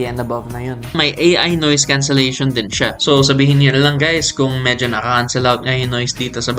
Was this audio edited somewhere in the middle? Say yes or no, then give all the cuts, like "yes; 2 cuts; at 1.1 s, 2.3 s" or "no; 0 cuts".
yes; 1 cut; at 1.0 s